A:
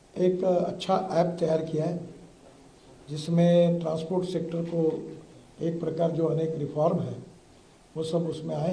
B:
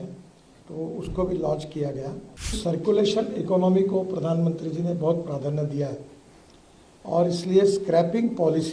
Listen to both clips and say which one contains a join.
B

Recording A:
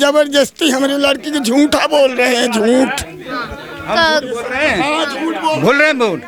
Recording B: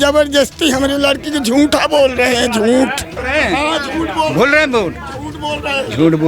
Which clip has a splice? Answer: B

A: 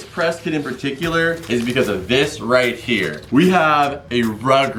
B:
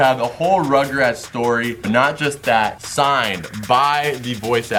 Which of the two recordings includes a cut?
A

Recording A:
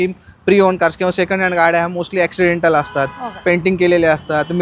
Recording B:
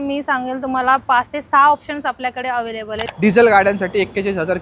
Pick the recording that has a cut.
B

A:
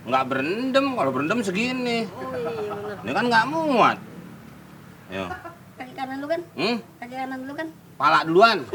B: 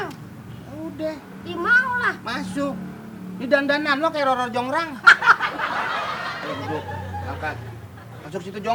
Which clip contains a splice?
B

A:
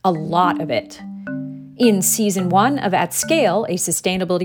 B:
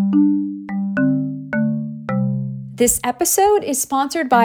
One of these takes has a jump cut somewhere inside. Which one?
B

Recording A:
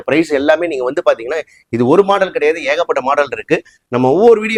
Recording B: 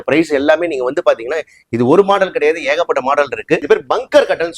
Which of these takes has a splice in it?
B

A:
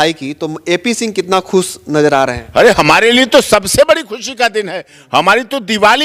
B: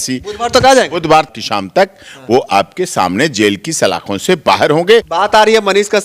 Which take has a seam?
B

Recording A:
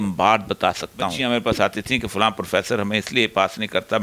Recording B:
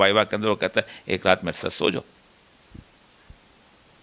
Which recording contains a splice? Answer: A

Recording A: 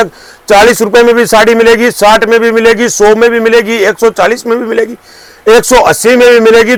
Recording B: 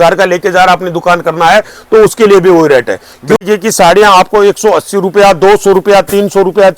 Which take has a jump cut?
B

